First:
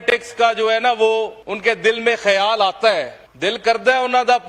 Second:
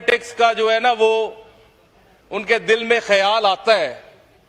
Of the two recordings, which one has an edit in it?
first; 2 cuts; at 1.4 s, 3.2 s

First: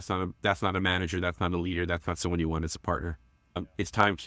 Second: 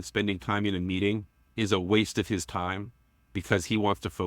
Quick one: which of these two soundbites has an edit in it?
second; 1 cut; at 1.4 s

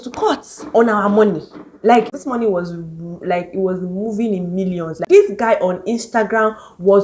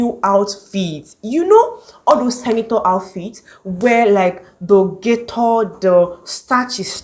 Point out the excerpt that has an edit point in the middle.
first; 2 cuts; at 2.2 s, 5.0 s

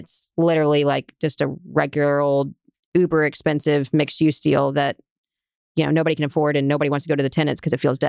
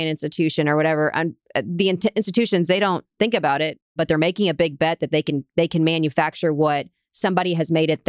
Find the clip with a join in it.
second; 1 cut; at 3.9 s

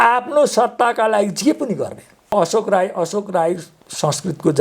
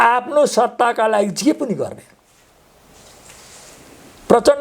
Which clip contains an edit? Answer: first; 1 cut; at 2.3 s

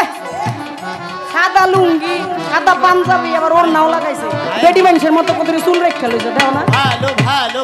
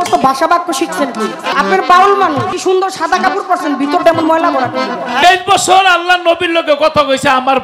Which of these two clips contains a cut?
second; 3 cuts; at 1.5 s, 2.5 s, 5.2 s

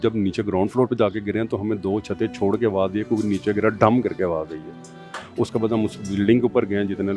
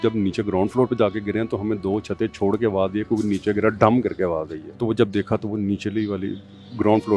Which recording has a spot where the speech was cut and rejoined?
second; 1 cut; at 4.6 s

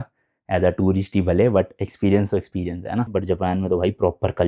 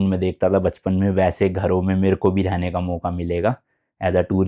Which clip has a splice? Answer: first; 1 cut; at 3.1 s

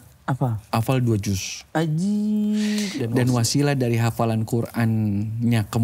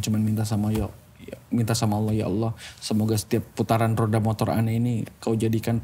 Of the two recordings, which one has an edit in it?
first; 1 cut; at 3.0 s

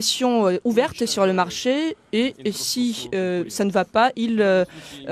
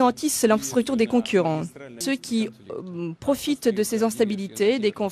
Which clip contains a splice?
second; 1 cut; at 2.0 s

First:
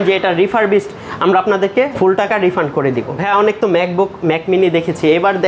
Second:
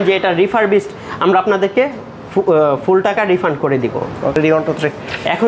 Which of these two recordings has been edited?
first; 2 cuts; at 1.9 s, 3.1 s

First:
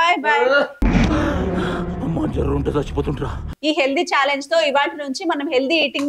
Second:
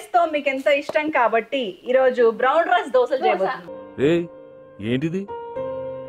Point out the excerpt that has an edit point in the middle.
first; 1 cut; at 3.4 s

